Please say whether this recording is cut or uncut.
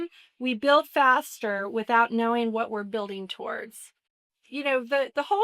cut